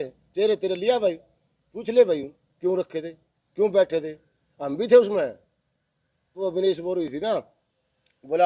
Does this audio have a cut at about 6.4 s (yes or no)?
yes